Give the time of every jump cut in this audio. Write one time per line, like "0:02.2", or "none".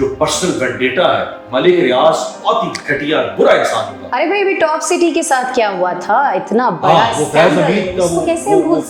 none